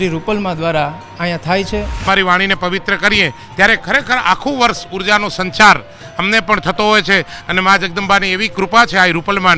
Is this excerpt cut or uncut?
cut